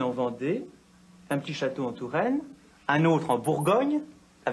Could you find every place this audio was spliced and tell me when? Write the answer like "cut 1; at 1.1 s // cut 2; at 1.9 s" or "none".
cut 1; at 2.6 s